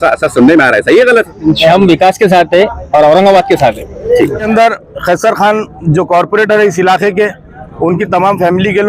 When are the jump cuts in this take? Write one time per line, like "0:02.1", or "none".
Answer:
0:04.4